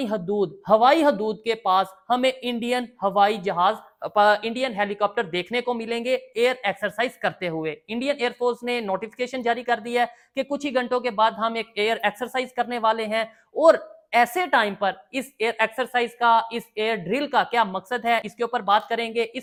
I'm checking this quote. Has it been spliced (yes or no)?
no